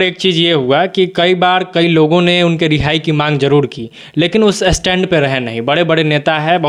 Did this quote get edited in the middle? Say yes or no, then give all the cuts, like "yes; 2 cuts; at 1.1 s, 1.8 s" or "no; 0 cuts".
no; 0 cuts